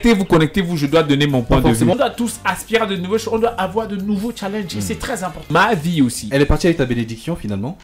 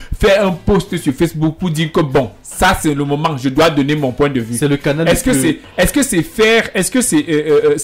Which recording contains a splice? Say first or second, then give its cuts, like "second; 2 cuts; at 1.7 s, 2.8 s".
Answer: first; 2 cuts; at 2.0 s, 5.5 s